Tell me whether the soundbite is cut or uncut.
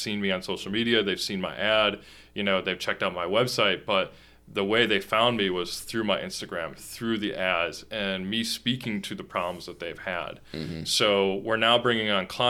uncut